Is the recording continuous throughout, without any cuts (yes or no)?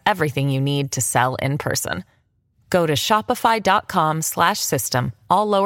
yes